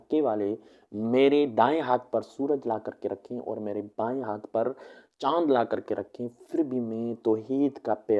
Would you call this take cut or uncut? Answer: uncut